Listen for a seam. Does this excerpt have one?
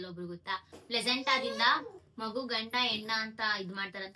no; 0 cuts

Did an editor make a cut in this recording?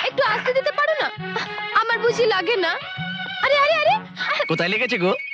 no; 0 cuts

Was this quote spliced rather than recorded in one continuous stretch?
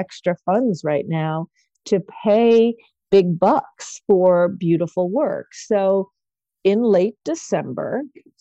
no; 0 cuts

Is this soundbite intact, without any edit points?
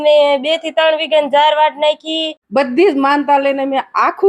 no; 1 cut; at 2.3 s

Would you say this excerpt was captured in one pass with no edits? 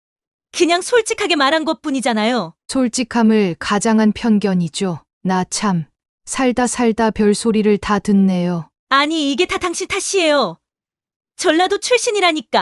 no; 1 cut; at 8.7 s

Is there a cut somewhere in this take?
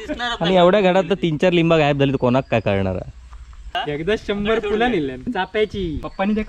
yes; 2 cuts; at 3.7 s, 5.6 s

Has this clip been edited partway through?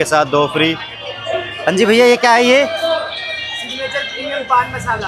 no; 0 cuts

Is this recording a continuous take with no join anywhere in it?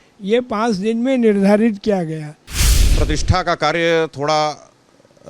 no; 1 cut; at 2.6 s

